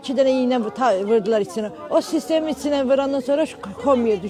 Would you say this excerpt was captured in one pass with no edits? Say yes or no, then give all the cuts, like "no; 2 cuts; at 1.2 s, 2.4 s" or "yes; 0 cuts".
yes; 0 cuts